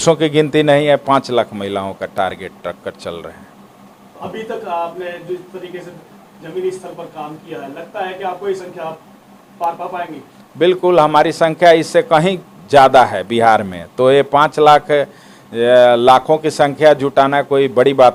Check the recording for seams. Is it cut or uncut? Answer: uncut